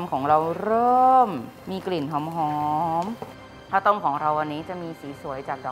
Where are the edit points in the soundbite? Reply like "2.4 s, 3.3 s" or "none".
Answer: 3.5 s